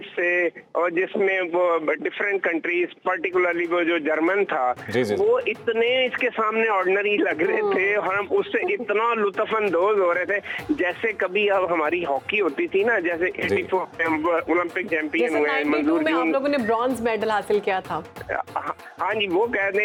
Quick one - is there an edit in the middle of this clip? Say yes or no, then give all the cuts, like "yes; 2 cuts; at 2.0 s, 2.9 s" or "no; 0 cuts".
no; 0 cuts